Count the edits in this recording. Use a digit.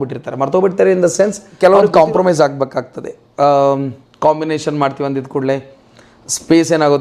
1